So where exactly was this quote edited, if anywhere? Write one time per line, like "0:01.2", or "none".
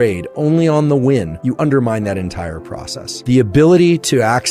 0:01.5
0:03.2